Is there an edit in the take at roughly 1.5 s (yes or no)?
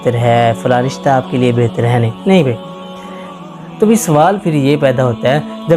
no